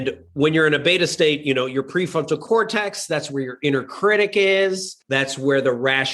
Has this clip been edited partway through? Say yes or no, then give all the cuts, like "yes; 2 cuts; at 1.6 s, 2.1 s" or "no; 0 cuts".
yes; 1 cut; at 4.9 s